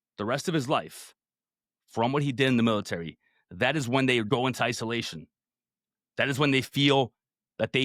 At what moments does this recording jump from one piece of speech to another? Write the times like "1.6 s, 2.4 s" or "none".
4.3 s